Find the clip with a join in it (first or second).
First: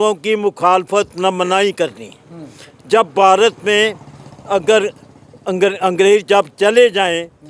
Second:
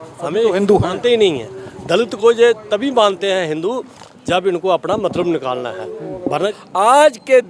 second